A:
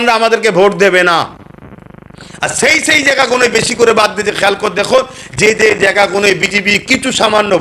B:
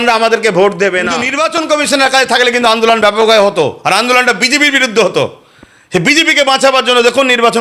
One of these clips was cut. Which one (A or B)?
B